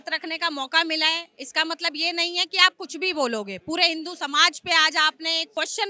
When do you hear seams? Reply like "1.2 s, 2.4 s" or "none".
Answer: none